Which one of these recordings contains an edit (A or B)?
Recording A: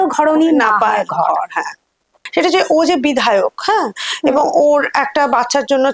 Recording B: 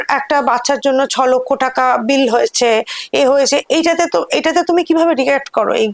A